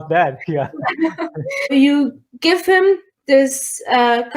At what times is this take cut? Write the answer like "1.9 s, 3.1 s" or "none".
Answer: 1.7 s